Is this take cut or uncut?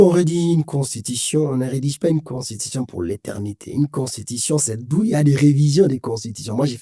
uncut